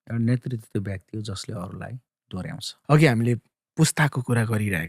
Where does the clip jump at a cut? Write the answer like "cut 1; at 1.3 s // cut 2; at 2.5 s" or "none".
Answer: cut 1; at 2.7 s